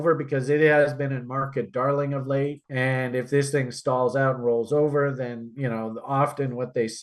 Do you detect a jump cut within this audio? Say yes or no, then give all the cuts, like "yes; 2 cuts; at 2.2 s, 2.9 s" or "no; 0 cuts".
no; 0 cuts